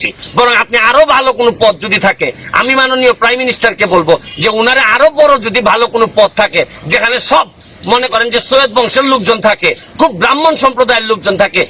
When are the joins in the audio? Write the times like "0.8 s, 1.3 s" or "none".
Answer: none